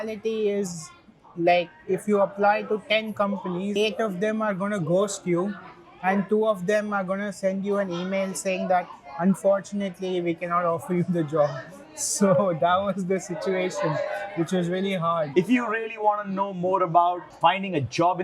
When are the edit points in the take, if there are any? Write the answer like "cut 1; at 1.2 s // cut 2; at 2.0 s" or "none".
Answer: cut 1; at 15.3 s // cut 2; at 17.3 s